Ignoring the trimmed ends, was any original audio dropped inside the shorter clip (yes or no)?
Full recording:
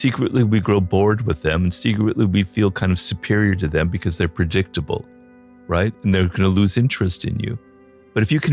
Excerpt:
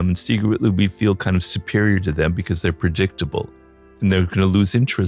yes